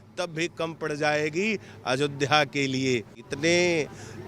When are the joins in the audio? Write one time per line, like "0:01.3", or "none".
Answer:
0:03.2